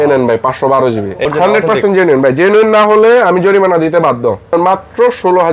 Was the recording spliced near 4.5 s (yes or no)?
yes